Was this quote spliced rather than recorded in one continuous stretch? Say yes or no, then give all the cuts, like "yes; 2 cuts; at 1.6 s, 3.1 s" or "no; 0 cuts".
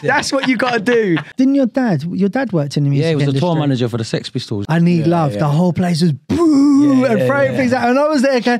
yes; 2 cuts; at 1.3 s, 4.6 s